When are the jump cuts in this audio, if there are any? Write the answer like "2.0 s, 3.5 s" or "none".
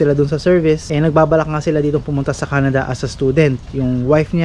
none